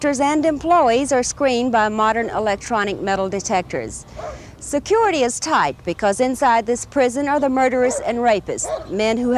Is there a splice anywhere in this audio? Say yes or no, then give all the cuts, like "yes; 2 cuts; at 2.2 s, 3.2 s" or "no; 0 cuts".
yes; 1 cut; at 5.8 s